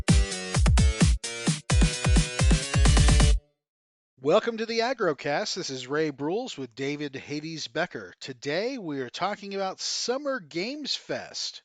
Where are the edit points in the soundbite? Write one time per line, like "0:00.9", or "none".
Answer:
0:01.1